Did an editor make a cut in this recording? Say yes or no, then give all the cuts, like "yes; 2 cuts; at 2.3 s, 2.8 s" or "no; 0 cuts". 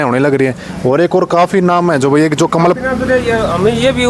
no; 0 cuts